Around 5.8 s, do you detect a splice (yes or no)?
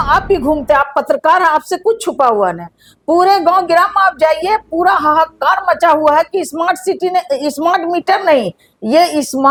no